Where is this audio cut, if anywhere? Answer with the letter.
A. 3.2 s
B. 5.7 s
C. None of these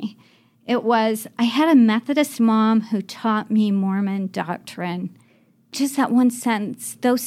B